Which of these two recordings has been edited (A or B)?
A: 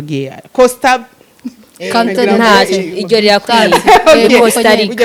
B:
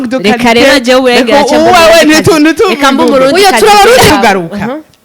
B